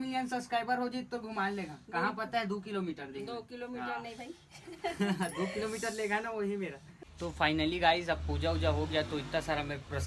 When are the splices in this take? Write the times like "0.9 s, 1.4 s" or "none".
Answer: none